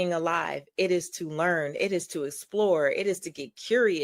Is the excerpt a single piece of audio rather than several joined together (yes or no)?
yes